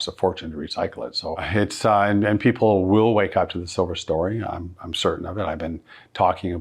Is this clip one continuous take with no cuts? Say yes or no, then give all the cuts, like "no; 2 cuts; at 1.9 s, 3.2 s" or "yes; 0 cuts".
no; 1 cut; at 1.5 s